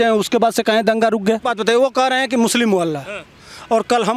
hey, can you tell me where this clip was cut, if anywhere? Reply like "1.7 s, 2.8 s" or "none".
1.5 s